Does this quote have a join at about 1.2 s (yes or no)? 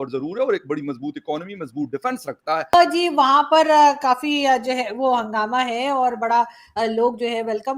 no